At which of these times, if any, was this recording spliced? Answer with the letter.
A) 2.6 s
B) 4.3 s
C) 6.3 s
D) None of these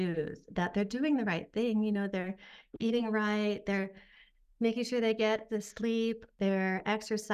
C